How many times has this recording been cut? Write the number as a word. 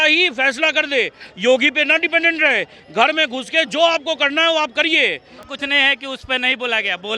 one